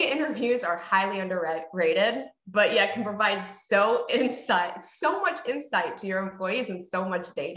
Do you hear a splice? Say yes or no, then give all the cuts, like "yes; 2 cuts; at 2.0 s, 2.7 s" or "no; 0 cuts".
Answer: no; 0 cuts